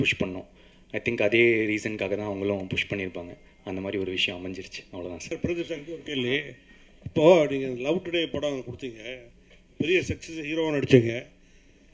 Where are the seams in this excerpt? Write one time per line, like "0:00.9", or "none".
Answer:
0:05.2